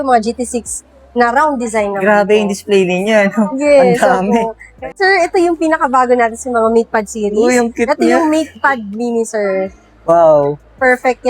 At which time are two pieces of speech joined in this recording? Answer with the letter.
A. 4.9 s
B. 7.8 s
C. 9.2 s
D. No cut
A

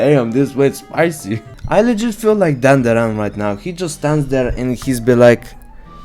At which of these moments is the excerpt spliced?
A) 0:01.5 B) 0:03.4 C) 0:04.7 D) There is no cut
A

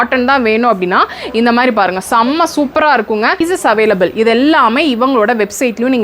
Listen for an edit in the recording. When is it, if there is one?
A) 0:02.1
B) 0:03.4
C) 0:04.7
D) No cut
B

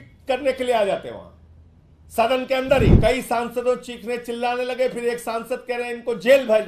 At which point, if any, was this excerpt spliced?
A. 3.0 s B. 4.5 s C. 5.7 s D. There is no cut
A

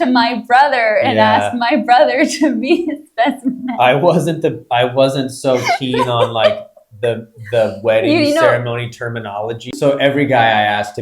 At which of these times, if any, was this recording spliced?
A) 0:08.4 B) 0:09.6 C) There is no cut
B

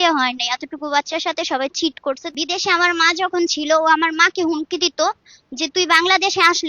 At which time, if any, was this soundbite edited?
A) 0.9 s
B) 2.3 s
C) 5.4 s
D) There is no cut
B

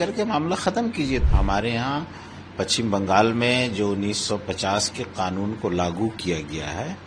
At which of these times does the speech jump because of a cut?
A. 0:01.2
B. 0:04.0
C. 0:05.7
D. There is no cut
A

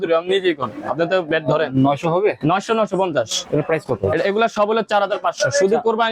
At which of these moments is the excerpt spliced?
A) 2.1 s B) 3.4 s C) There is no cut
B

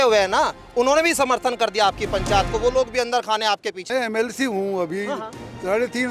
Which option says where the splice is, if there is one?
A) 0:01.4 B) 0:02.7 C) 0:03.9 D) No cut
C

